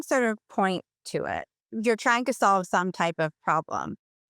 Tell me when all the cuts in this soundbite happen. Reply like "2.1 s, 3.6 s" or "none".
1.6 s